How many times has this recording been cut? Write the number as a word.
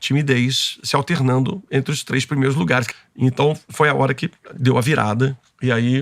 one